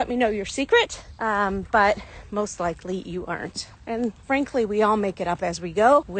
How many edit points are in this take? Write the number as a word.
zero